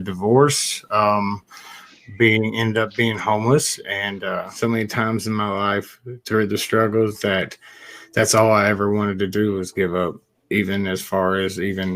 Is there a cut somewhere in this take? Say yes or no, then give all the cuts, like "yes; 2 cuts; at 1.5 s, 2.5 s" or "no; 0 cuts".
yes; 1 cut; at 4.5 s